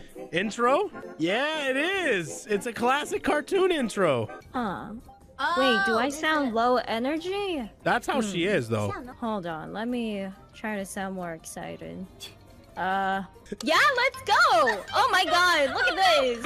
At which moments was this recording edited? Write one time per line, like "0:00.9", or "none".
0:01.0
0:04.4
0:07.7
0:09.1
0:13.4